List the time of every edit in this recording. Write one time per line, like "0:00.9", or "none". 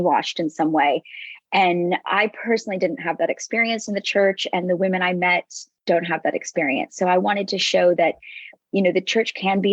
none

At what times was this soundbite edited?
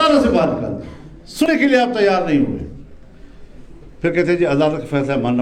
0:01.5

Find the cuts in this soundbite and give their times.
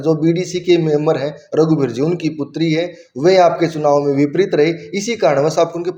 none

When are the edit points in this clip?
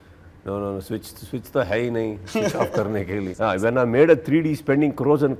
0:03.3

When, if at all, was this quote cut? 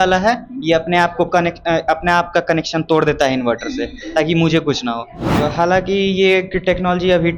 0:05.2

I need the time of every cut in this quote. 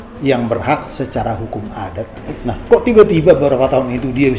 0:02.2

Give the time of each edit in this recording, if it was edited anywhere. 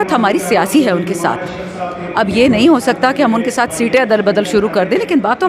none

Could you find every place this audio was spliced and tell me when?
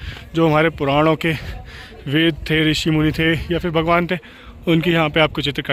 none

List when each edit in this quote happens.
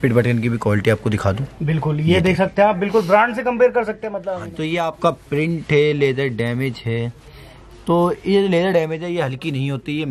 0:04.2

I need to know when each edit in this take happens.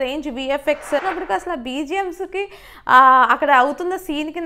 0:01.0

